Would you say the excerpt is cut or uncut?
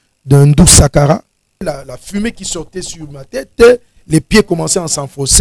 cut